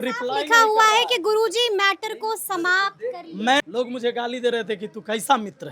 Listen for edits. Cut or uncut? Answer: cut